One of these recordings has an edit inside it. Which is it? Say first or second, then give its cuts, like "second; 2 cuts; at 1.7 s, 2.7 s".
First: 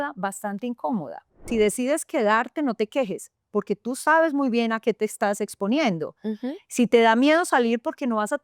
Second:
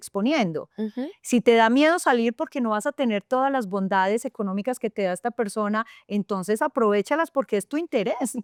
first; 1 cut; at 1.4 s